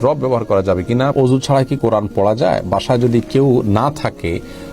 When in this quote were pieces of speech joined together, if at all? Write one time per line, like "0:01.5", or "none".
0:01.1